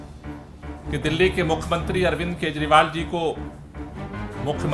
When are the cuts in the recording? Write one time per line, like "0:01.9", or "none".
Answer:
none